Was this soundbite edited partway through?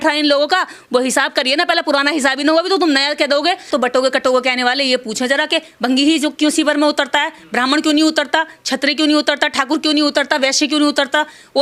yes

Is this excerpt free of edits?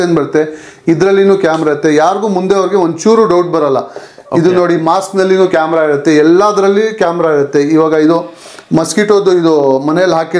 yes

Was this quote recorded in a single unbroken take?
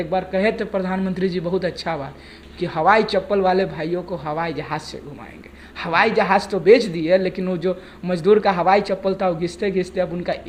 yes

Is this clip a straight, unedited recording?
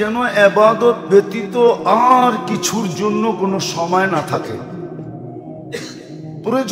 yes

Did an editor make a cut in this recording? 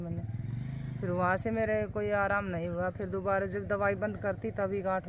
no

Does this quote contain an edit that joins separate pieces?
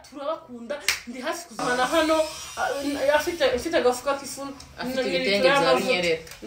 yes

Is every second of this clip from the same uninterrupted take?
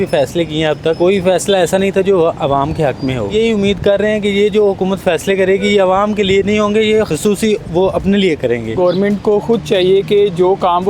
no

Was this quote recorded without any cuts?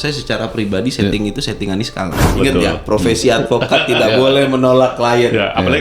no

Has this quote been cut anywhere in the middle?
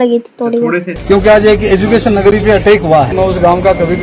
yes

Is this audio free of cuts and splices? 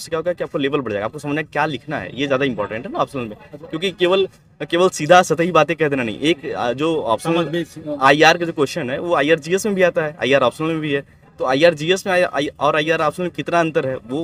yes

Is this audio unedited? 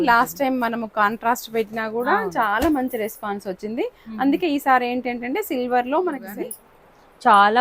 no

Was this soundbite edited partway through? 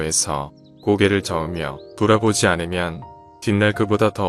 no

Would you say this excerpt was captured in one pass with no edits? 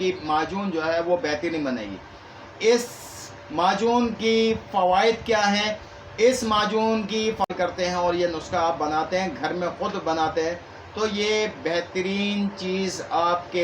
no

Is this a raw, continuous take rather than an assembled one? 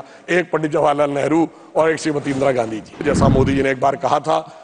no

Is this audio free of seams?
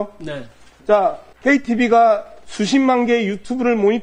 no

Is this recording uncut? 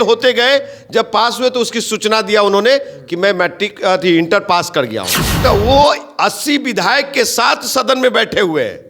no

